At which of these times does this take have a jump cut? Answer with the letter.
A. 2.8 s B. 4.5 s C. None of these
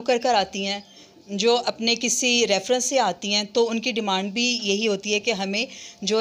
C